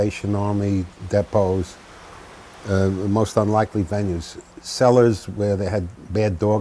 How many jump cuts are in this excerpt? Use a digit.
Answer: 1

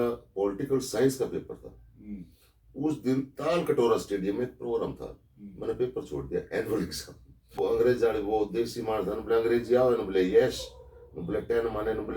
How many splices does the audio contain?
1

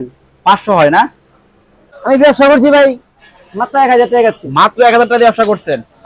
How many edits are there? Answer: 1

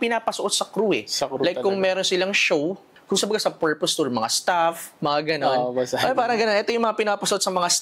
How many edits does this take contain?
0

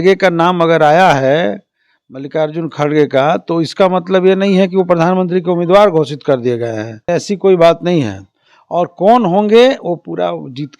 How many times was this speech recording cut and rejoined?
1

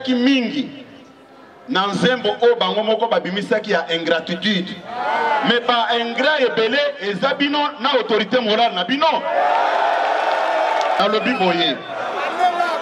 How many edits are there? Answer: 1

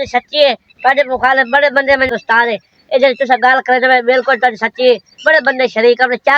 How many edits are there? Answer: 1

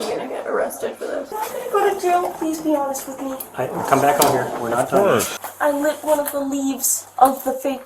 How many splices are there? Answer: 1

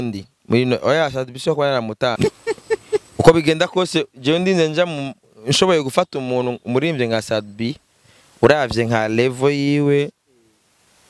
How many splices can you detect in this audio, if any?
1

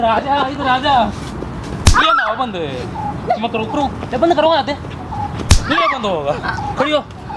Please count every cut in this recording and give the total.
0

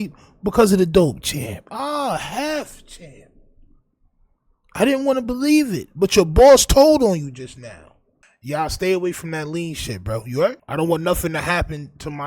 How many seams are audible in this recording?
1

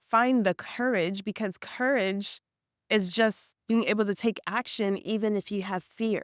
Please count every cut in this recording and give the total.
0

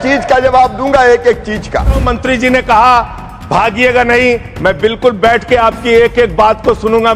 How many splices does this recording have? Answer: 1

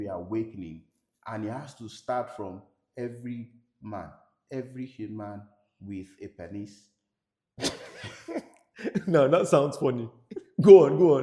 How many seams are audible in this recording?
0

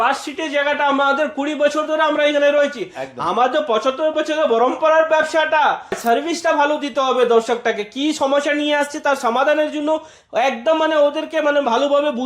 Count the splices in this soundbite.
1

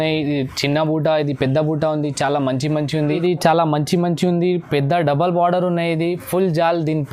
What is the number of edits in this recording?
1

